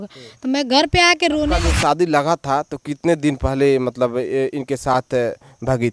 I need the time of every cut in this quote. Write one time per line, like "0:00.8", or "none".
0:01.5